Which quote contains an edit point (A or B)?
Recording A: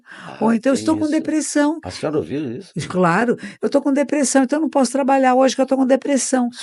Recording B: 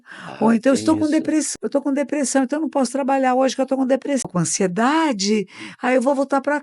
B